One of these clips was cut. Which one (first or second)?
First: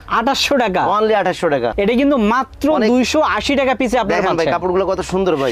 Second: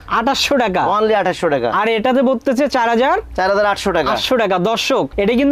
first